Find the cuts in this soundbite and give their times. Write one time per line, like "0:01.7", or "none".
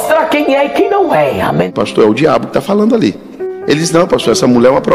0:01.7